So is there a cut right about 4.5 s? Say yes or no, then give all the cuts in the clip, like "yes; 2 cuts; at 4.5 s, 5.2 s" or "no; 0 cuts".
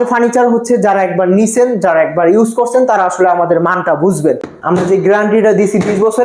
yes; 1 cut; at 4.5 s